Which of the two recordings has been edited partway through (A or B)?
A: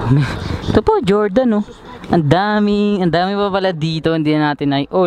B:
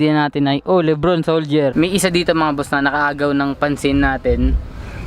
B